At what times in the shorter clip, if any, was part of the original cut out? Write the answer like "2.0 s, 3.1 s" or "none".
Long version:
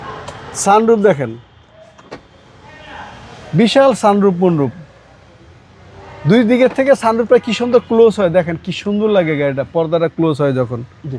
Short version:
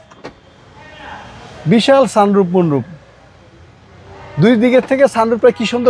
none